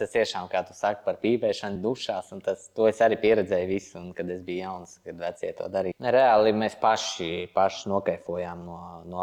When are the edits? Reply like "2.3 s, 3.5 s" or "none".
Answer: 1.7 s, 5.9 s